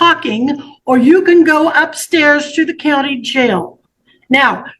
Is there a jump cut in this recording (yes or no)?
no